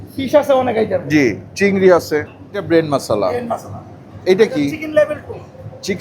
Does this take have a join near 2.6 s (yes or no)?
yes